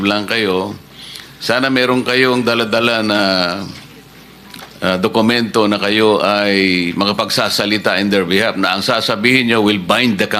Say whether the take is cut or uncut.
uncut